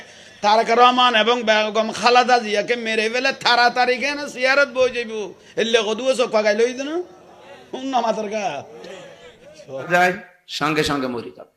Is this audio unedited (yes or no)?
no